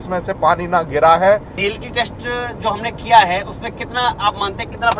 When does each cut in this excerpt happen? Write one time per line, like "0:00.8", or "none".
0:01.6